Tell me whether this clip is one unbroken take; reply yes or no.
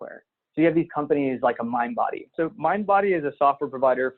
no